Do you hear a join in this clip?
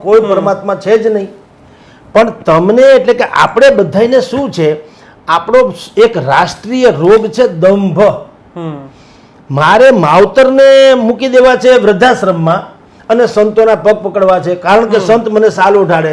no; 0 cuts

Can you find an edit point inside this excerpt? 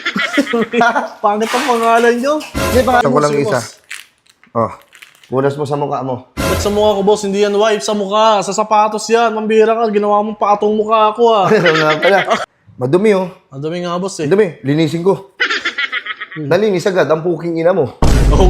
yes; 2 cuts; at 3.0 s, 12.4 s

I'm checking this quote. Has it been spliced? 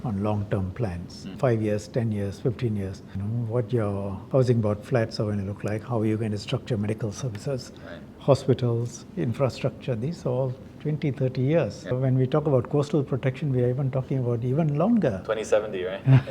yes; 4 cuts; at 1.3 s, 3.2 s, 4.2 s, 11.9 s

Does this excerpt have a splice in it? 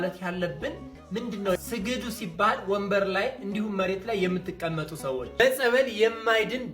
yes; 1 cut; at 5.3 s

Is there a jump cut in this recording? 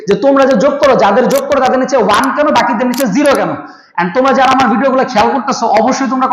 no; 0 cuts

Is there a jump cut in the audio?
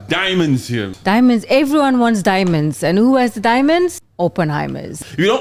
yes; 2 cuts; at 0.9 s, 4.6 s

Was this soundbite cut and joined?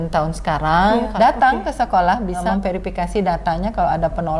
yes; 2 cuts; at 1.1 s, 2.4 s

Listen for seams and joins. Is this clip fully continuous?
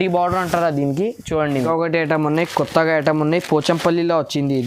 no; 1 cut; at 1.7 s

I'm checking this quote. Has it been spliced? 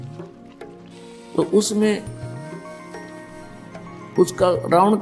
no; 0 cuts

